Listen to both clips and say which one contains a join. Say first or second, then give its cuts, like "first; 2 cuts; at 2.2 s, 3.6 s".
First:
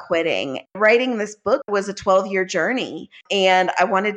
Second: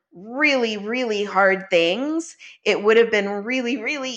first; 3 cuts; at 0.8 s, 1.7 s, 3.2 s